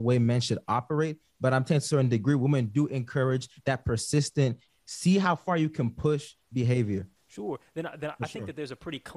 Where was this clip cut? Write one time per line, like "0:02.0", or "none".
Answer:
0:04.6
0:07.2

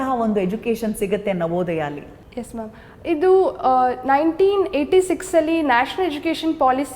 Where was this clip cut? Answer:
none

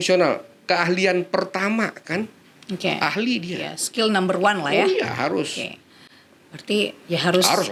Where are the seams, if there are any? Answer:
none

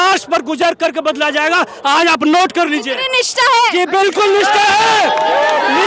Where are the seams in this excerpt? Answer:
none

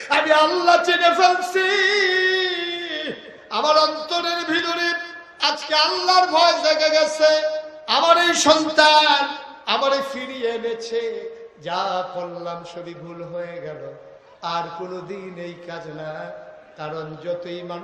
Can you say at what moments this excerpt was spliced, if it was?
none

